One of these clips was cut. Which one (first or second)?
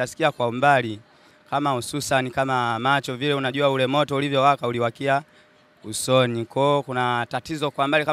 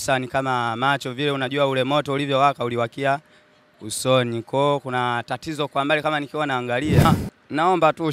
second